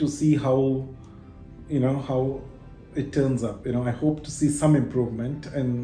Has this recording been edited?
no; 0 cuts

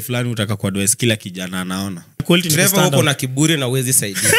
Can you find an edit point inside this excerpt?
yes; 1 cut; at 2.2 s

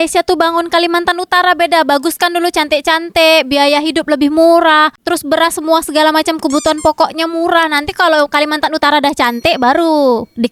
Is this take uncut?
yes; 0 cuts

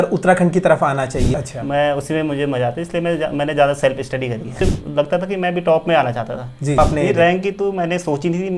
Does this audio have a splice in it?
yes; 3 cuts; at 1.3 s, 4.6 s, 6.8 s

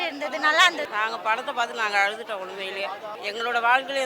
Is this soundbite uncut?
no; 2 cuts; at 0.9 s, 3.1 s

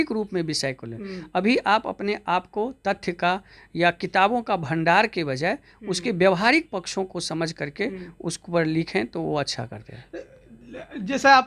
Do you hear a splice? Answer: no; 0 cuts

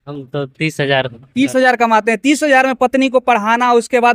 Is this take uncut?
yes; 0 cuts

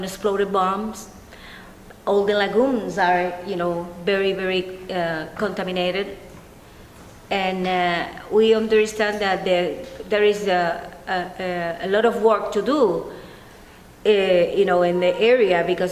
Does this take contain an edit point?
yes; 1 cut; at 14.4 s

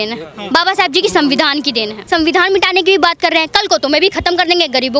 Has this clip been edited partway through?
yes; 1 cut; at 2.0 s

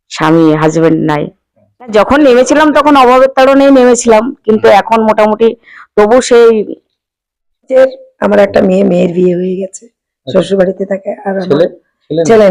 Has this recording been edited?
yes; 2 cuts; at 1.9 s, 7.7 s

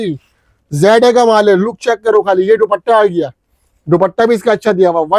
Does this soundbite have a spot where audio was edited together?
no; 0 cuts

